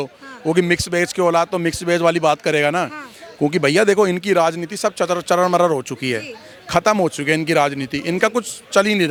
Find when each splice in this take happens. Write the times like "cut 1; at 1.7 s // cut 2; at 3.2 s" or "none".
none